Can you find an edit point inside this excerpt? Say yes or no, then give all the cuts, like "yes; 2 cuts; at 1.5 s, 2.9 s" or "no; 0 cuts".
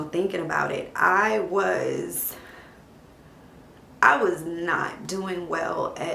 no; 0 cuts